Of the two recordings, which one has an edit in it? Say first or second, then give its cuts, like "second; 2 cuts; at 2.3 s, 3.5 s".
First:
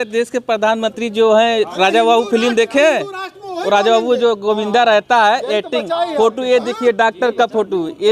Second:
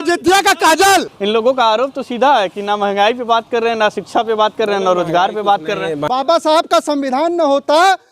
second; 2 cuts; at 1.1 s, 6.0 s